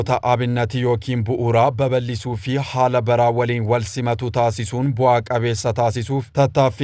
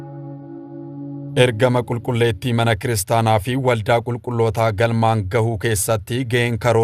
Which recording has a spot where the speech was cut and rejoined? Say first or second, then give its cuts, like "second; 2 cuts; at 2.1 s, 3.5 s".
second; 1 cut; at 1.3 s